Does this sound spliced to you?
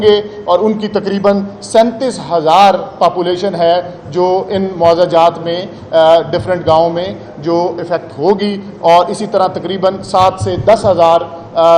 no; 0 cuts

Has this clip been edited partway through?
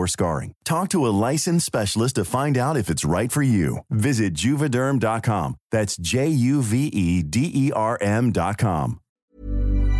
yes; 1 cut; at 9.1 s

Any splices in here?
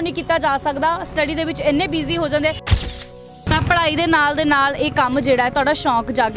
yes; 1 cut; at 2.9 s

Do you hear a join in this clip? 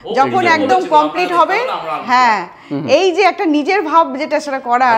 no; 0 cuts

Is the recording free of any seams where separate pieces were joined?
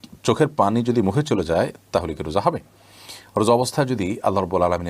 yes; 0 cuts

